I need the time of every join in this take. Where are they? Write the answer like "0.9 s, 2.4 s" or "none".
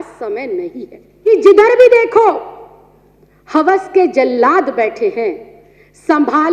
1.3 s